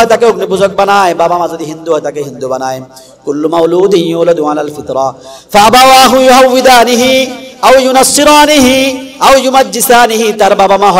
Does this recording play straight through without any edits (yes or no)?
yes